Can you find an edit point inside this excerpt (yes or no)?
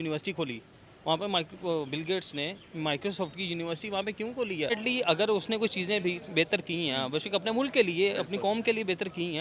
yes